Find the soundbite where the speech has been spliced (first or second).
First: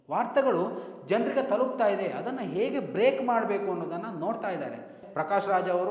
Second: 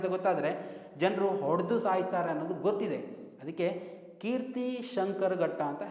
first